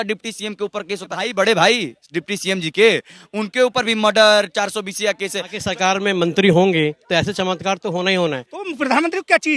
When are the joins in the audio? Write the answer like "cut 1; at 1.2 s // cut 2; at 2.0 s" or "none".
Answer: cut 1; at 1.3 s // cut 2; at 5.6 s // cut 3; at 8.6 s